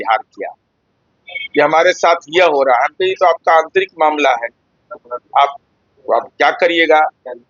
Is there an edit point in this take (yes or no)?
no